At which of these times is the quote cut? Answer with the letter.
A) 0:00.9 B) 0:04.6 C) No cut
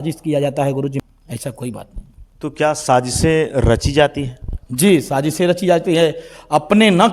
A